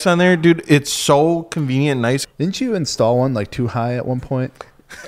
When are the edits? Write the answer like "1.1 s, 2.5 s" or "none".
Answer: 2.3 s

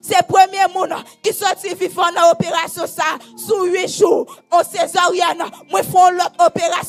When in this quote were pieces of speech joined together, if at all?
none

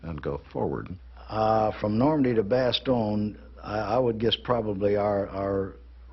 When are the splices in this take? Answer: 2.3 s

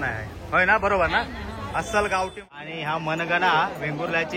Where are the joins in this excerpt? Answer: 2.4 s

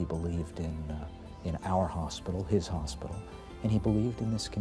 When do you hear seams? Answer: none

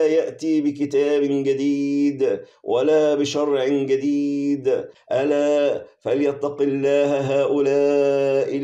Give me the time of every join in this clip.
5.0 s

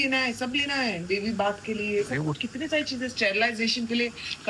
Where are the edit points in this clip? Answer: none

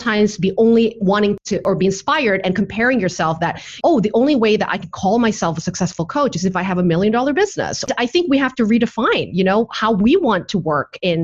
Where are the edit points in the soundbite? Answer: 3.7 s, 7.9 s

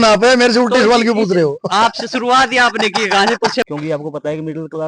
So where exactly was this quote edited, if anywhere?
3.6 s

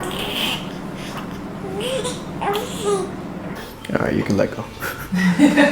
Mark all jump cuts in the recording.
3.6 s

